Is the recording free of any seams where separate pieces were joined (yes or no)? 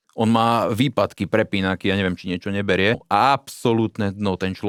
yes